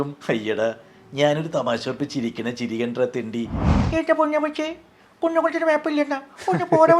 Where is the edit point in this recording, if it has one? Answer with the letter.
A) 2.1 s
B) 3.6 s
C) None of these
B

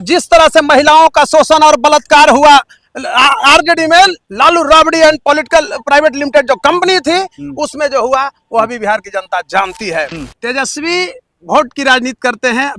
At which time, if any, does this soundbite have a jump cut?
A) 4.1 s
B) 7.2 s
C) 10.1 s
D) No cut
C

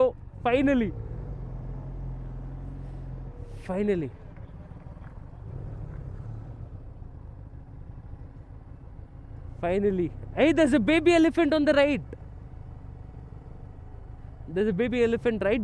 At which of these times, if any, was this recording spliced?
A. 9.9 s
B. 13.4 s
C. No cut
C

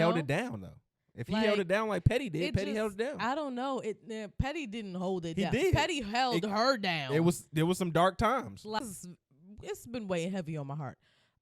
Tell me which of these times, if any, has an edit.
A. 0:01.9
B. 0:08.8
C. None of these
B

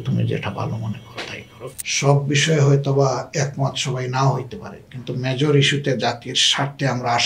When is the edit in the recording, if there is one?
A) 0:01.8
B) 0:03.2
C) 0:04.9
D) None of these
A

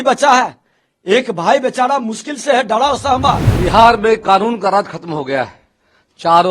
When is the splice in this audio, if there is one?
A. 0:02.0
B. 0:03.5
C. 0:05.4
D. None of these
B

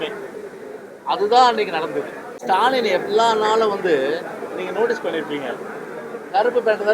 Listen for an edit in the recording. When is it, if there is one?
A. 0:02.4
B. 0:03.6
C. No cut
A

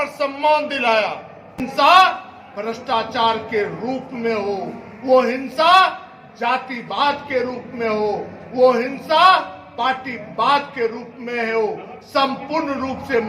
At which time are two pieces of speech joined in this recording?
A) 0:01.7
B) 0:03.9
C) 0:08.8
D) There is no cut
A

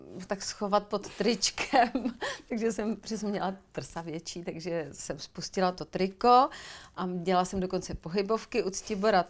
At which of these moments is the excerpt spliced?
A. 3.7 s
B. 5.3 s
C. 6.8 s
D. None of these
D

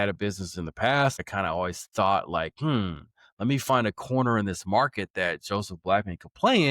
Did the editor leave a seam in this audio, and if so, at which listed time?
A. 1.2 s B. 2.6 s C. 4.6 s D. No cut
A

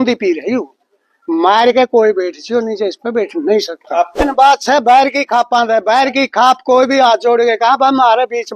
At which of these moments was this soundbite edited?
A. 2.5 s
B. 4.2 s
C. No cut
B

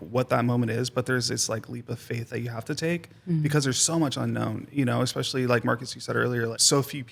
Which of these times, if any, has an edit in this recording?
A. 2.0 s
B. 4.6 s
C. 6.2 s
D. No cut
D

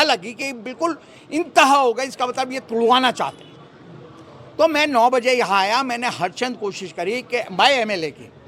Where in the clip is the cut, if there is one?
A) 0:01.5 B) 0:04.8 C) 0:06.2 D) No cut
D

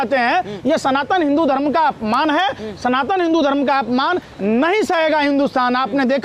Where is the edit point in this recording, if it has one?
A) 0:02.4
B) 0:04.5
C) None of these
C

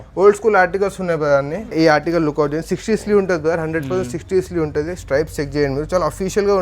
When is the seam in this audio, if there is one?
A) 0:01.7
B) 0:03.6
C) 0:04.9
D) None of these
A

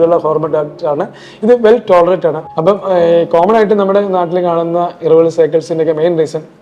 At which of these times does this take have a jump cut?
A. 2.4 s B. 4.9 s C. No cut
A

